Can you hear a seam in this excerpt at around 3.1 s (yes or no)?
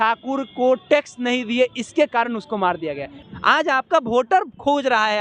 yes